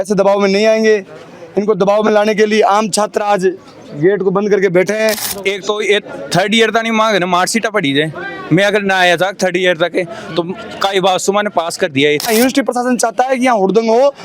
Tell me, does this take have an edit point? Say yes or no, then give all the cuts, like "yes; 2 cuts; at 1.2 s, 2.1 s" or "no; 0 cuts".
yes; 2 cuts; at 5.3 s, 12.2 s